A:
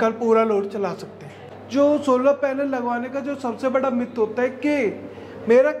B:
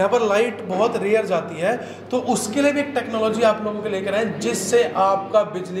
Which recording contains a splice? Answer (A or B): A